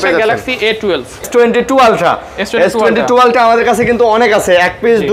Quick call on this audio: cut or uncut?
cut